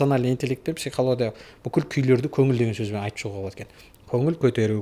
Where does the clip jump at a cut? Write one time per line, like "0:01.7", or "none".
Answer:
none